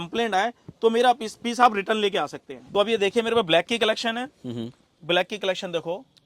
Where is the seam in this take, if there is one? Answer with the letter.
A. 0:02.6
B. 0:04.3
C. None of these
A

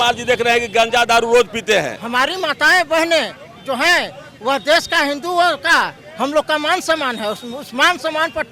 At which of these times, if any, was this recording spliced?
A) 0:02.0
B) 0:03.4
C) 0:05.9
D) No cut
A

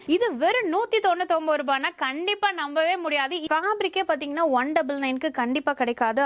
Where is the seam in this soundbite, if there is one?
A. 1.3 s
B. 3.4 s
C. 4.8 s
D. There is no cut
B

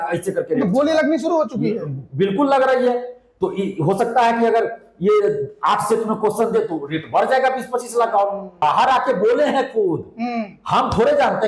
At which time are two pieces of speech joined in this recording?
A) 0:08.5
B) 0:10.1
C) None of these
A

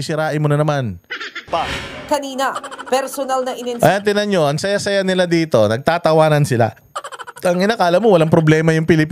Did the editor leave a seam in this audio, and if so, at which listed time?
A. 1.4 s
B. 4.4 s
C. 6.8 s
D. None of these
A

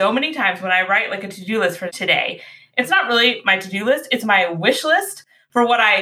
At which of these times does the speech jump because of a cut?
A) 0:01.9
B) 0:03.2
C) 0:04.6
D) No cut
A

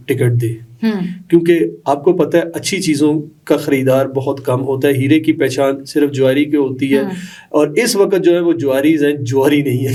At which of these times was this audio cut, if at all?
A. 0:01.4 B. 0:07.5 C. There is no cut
C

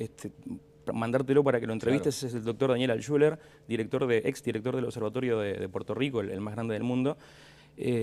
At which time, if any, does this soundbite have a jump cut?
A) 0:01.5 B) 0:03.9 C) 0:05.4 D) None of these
C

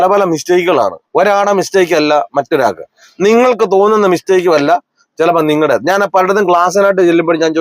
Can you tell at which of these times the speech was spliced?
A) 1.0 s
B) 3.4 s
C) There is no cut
A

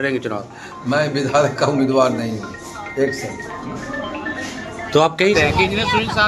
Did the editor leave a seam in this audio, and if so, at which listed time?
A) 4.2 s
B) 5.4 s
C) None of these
B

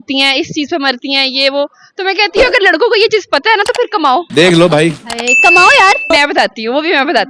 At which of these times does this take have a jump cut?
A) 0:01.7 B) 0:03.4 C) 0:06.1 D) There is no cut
C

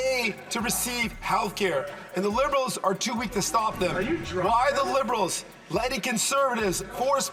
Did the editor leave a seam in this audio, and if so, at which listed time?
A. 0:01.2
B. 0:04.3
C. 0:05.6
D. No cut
D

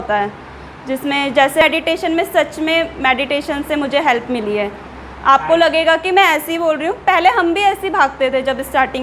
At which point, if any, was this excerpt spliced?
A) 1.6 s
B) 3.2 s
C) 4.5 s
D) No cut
A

